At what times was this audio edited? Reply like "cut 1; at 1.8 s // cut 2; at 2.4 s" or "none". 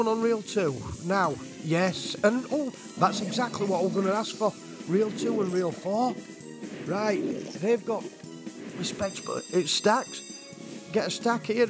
none